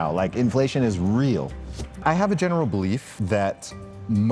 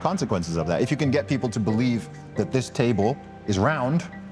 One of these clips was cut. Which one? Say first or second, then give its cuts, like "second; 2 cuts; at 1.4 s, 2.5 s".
first; 2 cuts; at 2.0 s, 3.1 s